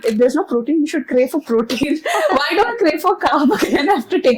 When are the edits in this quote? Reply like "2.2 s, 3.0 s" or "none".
none